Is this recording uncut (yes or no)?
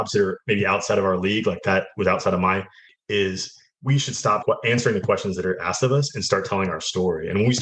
no